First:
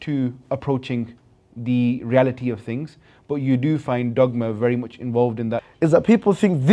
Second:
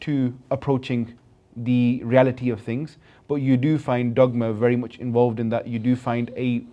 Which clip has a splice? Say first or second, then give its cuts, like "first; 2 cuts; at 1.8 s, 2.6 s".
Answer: first; 1 cut; at 5.7 s